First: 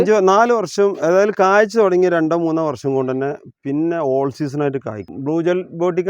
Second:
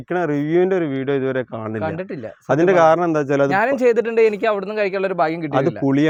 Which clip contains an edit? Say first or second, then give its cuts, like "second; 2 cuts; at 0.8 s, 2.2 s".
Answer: first; 1 cut; at 5.1 s